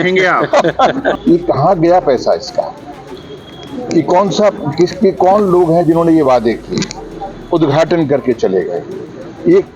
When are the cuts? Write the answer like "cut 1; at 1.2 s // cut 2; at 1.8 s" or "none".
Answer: cut 1; at 1.2 s